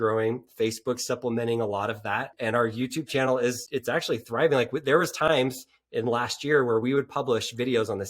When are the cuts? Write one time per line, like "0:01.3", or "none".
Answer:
0:02.3
0:03.6